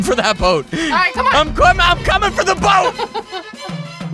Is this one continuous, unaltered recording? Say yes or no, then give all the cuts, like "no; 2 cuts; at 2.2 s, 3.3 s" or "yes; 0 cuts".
yes; 0 cuts